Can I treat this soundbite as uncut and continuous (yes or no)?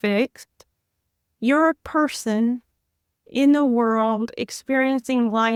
yes